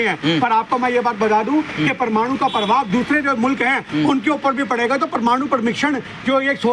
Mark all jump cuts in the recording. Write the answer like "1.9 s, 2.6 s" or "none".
none